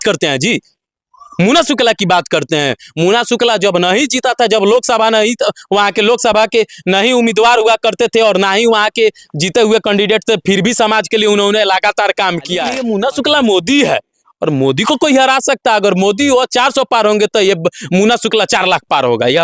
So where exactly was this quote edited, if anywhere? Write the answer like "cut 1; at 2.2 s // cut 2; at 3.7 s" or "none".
cut 1; at 12.7 s